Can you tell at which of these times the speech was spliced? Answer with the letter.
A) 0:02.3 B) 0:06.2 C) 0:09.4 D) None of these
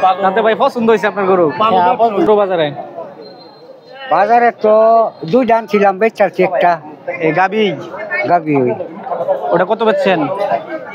A